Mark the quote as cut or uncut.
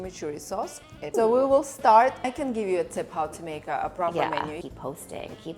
cut